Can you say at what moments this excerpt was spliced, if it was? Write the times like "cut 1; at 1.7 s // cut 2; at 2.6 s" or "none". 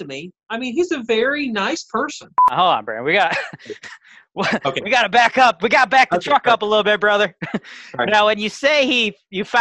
cut 1; at 2.5 s